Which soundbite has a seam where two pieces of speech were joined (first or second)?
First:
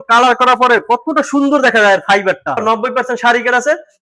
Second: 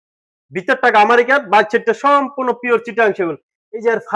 first